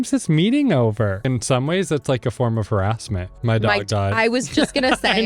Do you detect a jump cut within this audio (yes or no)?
yes